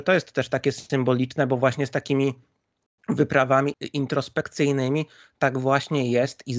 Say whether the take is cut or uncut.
cut